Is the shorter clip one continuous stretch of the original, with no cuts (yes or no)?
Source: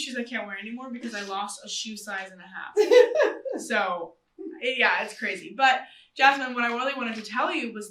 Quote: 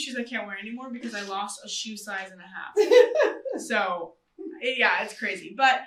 yes